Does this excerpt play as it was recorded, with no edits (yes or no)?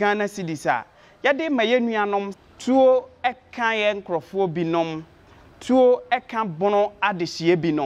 no